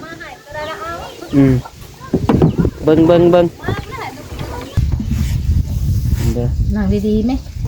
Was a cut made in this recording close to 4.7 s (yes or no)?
yes